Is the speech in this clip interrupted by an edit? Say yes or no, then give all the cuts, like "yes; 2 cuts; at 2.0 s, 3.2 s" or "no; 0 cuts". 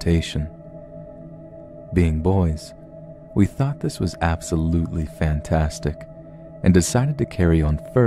no; 0 cuts